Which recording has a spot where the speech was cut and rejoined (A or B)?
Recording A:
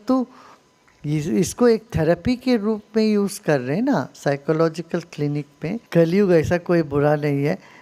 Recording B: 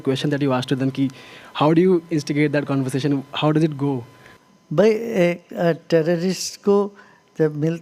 A